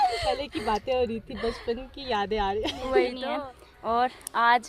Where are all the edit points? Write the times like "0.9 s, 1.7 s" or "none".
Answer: 3.2 s